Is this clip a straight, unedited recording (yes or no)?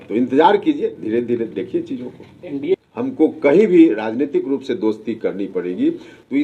no